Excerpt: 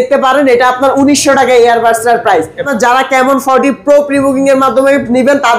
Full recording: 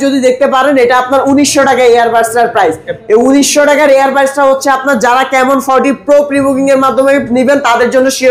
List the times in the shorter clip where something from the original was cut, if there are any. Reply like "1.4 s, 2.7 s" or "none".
2.7 s

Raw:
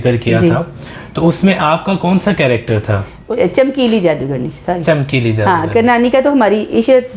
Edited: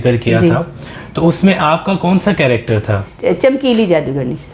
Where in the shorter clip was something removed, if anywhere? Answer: 3.1 s

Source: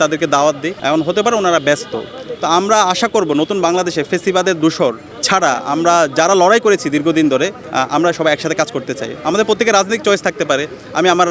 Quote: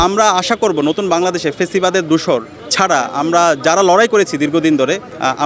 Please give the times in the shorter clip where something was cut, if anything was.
none

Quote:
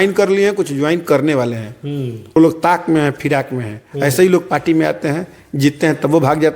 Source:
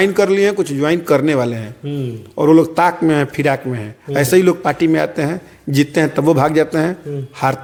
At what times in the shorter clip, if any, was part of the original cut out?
2.4 s

